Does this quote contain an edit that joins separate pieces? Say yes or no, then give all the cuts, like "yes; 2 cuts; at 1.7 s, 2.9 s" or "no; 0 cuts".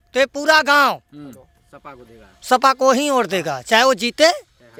no; 0 cuts